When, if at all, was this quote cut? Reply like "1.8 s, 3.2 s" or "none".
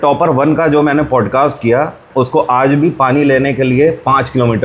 2.1 s